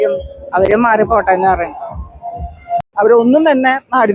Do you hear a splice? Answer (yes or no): yes